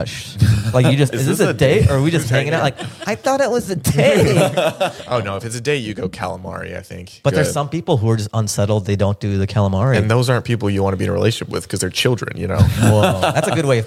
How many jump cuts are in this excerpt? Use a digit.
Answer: 3